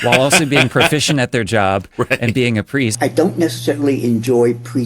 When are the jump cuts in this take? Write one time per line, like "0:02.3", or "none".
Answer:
0:02.9

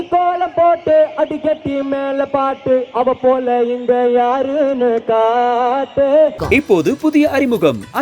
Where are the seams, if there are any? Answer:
0:06.4

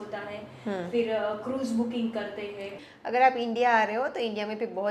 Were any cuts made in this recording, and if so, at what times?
0:02.7

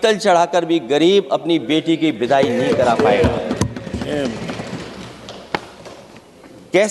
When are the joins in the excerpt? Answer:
none

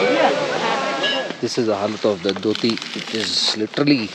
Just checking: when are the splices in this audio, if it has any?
0:01.1

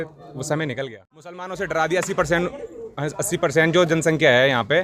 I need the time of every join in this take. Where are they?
0:01.5

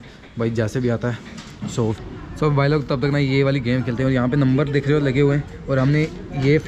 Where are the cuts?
0:02.0

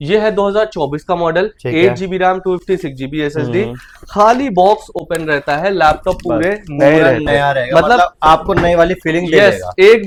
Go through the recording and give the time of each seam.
none

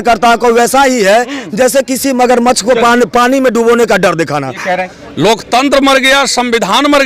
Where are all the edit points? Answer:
0:05.0

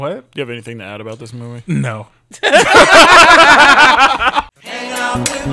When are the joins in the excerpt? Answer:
0:04.5

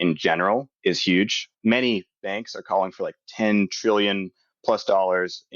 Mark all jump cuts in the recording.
0:01.1

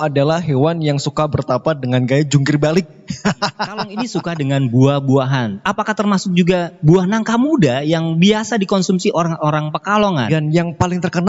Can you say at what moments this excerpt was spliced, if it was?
0:04.0
0:10.3

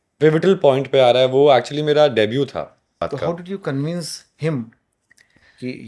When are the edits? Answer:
0:03.1

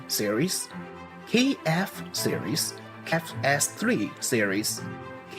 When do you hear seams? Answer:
0:03.1

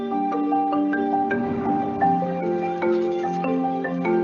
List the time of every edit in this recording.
0:01.4

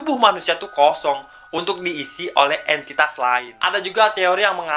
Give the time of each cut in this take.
0:03.6

